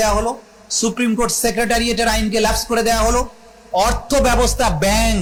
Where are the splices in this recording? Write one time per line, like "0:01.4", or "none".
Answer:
none